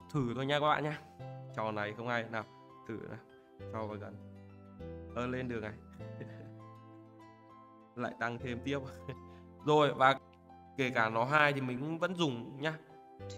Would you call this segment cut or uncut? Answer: cut